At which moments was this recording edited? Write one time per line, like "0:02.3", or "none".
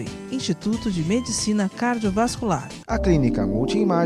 0:02.7